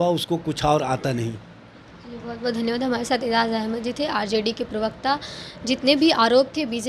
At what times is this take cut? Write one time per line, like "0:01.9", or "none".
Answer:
none